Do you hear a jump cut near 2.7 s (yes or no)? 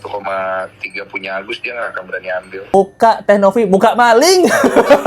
yes